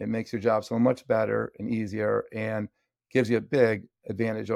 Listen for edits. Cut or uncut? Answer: uncut